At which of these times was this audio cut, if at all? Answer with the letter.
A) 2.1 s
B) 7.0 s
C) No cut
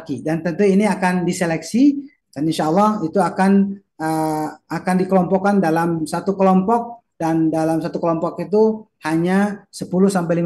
A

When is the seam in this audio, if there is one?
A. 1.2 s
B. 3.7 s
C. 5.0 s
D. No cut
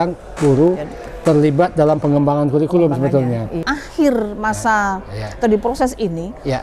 B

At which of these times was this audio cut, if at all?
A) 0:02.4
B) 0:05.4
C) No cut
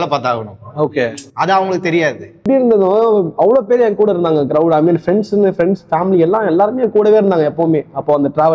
A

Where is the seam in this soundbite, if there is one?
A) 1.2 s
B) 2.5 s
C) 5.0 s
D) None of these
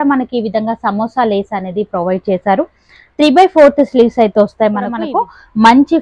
C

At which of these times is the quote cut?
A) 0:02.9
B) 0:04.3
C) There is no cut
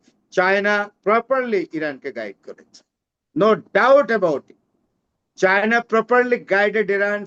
C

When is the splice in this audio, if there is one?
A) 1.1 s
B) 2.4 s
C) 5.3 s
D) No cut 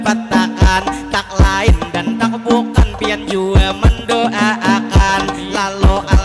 C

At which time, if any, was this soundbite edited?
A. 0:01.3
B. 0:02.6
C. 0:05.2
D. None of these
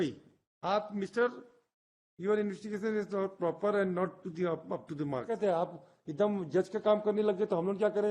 C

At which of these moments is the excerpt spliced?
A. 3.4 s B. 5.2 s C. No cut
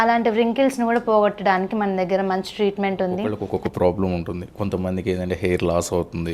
A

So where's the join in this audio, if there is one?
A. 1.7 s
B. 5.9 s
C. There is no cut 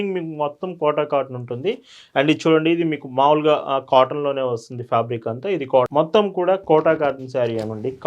B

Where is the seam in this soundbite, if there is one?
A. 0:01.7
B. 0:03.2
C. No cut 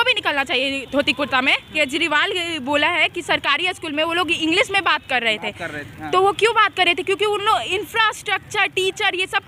A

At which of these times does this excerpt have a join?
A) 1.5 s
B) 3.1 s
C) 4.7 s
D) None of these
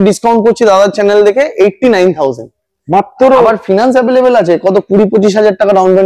D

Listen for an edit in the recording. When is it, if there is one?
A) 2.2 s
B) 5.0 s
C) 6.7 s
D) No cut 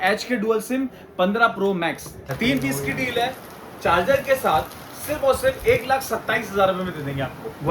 A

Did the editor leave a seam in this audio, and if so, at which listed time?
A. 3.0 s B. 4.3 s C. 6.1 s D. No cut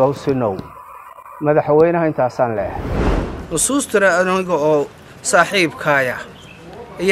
A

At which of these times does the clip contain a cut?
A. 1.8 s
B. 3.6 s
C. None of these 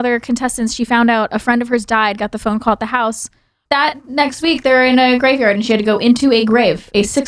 B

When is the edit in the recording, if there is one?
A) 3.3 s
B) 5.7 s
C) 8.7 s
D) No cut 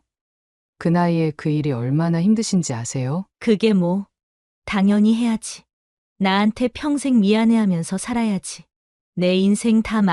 A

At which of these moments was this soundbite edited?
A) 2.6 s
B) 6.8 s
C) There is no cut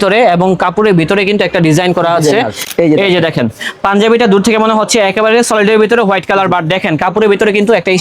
A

